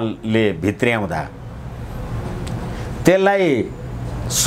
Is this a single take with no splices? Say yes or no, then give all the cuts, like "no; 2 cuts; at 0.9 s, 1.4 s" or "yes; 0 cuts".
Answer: yes; 0 cuts